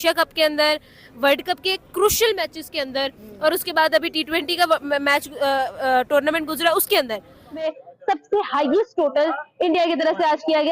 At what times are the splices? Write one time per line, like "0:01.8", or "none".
0:07.6